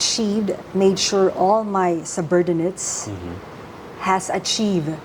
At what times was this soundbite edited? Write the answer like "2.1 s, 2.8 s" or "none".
none